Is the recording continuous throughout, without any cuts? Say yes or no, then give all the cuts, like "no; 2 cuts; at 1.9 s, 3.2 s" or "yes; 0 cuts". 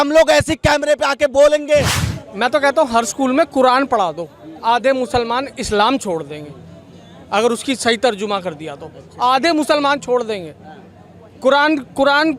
no; 1 cut; at 2.0 s